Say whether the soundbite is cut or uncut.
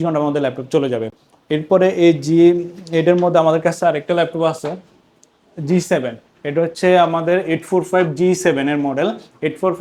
uncut